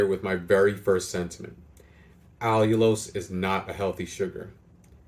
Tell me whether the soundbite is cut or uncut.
uncut